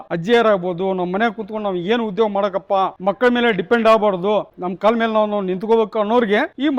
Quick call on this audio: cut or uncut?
uncut